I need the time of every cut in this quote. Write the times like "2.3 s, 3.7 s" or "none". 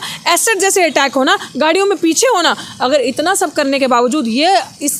none